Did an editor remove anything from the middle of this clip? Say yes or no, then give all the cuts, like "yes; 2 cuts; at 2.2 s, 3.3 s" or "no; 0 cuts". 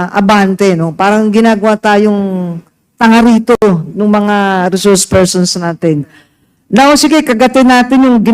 no; 0 cuts